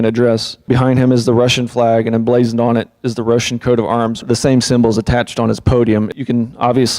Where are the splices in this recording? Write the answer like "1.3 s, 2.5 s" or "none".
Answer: 4.2 s